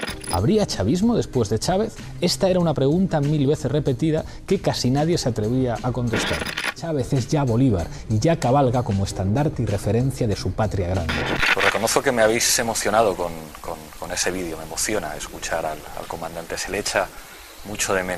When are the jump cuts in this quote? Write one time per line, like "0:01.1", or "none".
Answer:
none